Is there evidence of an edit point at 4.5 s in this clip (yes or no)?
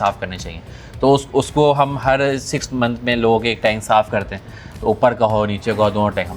no